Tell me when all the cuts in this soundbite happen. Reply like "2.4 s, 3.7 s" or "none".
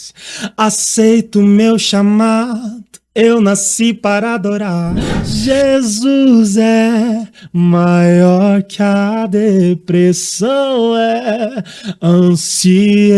5.1 s